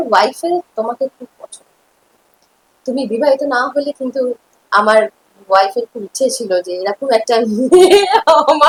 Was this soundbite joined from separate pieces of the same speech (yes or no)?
no